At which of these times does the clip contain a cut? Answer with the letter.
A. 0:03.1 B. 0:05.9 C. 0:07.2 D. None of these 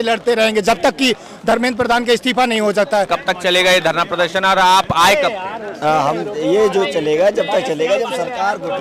A